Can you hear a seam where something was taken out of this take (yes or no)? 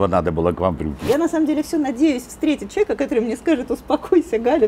yes